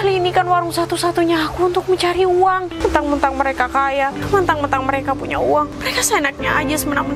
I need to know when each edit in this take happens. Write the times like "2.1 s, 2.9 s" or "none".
2.7 s, 4.2 s, 5.8 s